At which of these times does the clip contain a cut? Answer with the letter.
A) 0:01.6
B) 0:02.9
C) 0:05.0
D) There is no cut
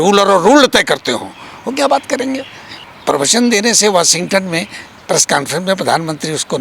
B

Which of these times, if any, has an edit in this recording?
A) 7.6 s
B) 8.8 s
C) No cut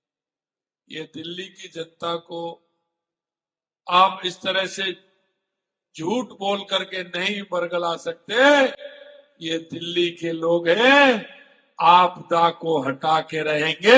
C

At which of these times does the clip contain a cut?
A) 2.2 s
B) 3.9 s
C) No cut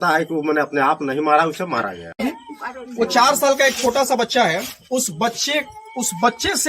A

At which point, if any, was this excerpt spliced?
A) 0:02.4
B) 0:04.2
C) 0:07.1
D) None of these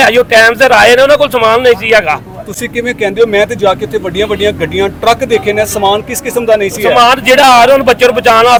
D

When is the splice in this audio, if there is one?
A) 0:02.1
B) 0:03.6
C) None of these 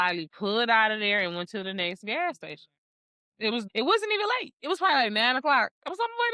B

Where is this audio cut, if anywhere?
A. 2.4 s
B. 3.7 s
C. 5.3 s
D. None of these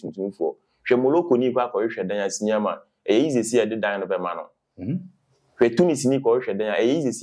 D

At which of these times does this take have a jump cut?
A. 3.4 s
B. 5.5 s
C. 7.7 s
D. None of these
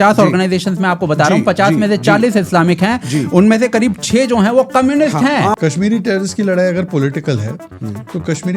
B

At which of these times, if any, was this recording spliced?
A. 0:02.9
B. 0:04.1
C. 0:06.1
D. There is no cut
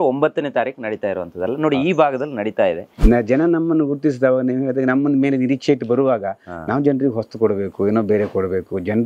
A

